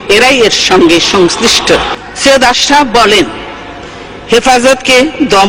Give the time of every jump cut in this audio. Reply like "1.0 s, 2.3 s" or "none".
1.9 s